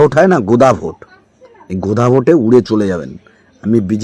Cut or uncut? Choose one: uncut